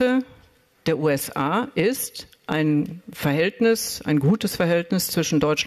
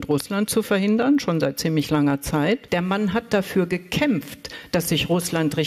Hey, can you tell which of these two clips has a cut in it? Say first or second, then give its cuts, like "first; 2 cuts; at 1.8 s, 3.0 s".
second; 1 cut; at 2.6 s